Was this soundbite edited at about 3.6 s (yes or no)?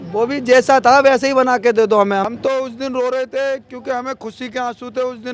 no